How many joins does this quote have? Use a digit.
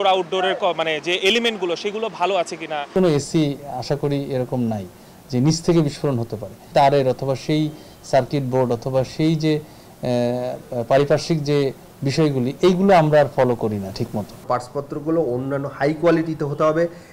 3